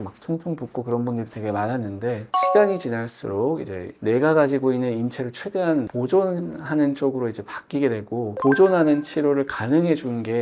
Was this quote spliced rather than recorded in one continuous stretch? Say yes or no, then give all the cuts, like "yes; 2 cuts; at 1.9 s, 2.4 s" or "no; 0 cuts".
no; 0 cuts